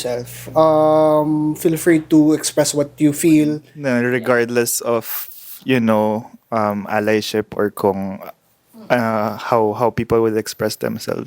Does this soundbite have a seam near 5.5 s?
no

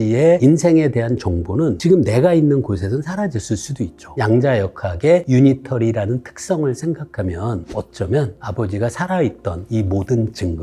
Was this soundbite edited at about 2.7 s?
no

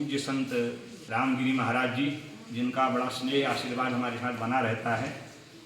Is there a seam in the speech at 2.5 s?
no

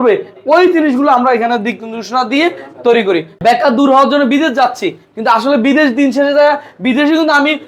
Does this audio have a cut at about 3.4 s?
yes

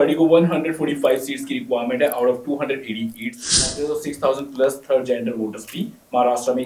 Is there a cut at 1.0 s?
no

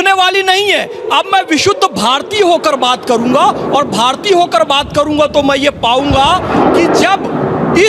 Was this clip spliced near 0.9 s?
no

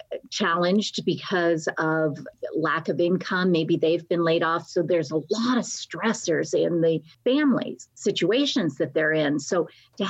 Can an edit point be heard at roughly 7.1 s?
yes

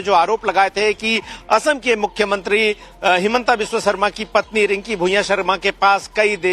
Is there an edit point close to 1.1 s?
no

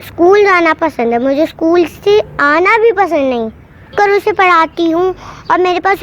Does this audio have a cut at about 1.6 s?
no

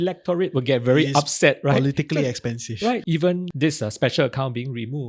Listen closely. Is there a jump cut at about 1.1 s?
no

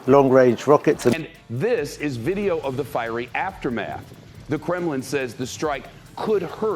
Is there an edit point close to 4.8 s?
no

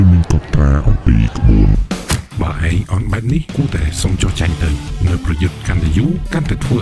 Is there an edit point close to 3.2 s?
no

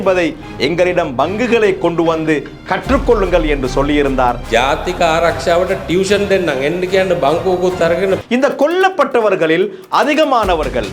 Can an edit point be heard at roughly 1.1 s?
no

